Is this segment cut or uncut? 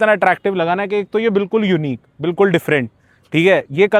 uncut